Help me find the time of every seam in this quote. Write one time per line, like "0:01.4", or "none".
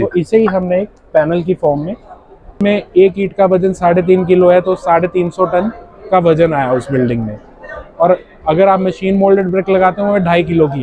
0:02.5